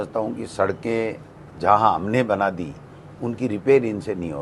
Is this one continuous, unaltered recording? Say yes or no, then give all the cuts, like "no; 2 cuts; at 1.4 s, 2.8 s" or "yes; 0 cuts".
yes; 0 cuts